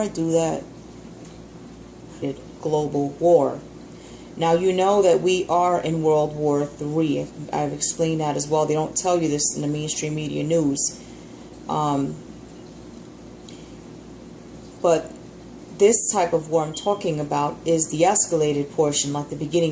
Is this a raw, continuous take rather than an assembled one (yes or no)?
yes